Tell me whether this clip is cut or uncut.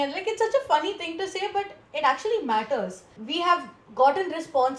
cut